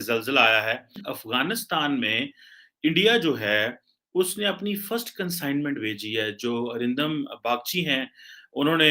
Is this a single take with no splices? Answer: no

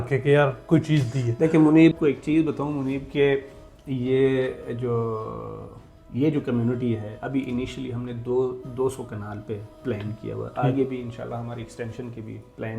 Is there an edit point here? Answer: yes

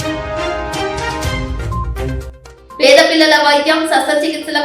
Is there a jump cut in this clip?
yes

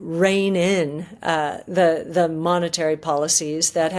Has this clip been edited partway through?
no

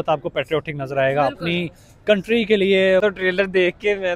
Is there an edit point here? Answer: yes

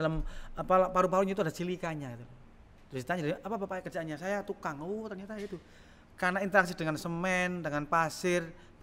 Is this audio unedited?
yes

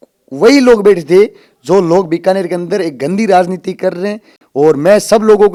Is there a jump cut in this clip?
no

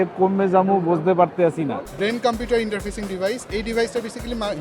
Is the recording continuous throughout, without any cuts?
no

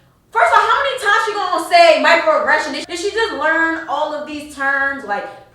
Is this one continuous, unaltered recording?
no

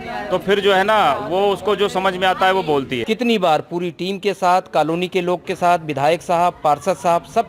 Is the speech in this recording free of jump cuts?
no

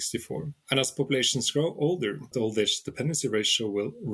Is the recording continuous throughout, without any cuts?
no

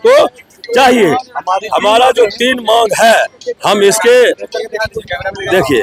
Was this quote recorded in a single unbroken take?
yes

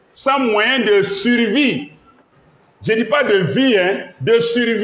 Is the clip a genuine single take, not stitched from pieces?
yes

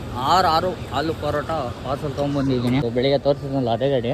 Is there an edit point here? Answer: yes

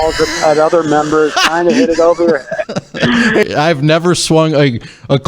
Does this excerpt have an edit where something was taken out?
yes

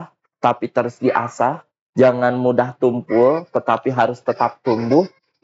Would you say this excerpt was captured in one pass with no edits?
yes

